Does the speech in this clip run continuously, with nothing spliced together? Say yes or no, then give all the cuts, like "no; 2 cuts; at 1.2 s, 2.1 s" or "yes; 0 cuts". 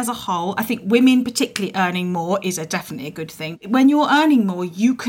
no; 1 cut; at 3.6 s